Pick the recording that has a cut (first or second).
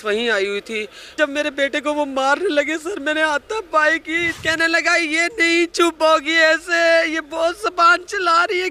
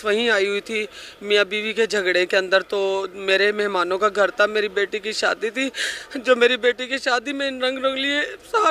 first